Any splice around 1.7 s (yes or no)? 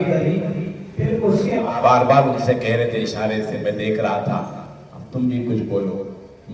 yes